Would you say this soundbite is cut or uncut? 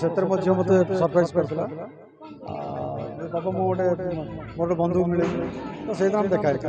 uncut